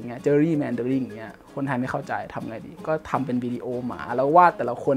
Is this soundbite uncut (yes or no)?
yes